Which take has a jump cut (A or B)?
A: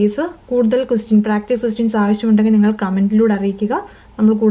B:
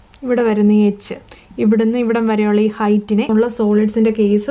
B